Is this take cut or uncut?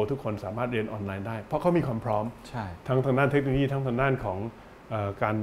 uncut